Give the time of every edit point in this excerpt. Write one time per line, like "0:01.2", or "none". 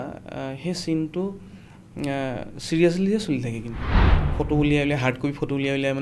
0:04.0